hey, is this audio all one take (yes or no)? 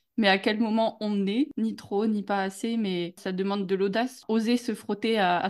no